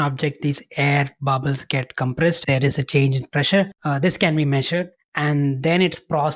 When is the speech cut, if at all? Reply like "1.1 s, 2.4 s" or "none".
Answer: 2.4 s, 3.8 s, 5.0 s